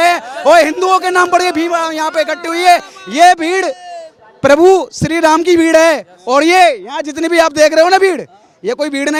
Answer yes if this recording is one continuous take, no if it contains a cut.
yes